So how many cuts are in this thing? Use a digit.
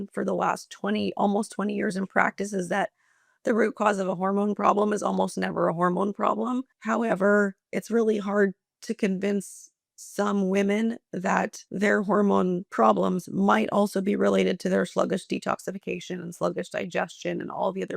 3